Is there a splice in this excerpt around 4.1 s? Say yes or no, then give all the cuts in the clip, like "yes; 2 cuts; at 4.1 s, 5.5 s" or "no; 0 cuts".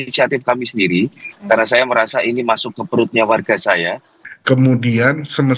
yes; 1 cut; at 4.1 s